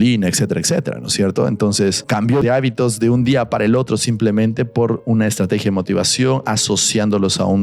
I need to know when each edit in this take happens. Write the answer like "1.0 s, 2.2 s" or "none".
2.4 s